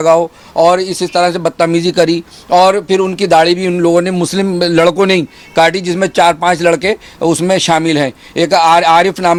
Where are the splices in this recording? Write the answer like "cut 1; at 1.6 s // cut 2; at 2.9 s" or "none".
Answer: none